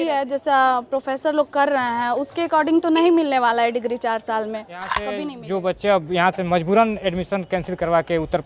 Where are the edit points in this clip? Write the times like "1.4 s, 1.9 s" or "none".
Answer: 5.2 s